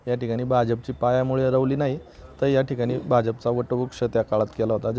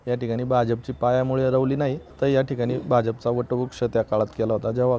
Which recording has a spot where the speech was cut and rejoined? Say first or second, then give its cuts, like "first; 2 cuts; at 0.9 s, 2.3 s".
second; 1 cut; at 2.0 s